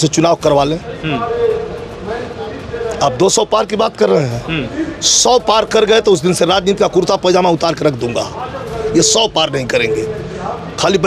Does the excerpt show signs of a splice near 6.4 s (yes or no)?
no